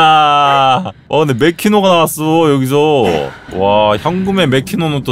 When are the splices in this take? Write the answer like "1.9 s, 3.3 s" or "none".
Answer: 0.9 s, 3.4 s